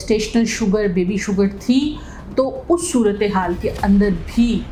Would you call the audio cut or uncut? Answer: uncut